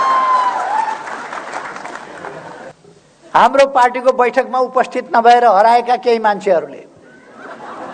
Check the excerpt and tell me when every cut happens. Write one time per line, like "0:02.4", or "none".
0:02.7